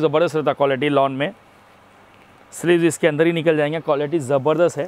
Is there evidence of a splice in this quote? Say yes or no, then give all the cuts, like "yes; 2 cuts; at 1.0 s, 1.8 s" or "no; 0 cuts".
no; 0 cuts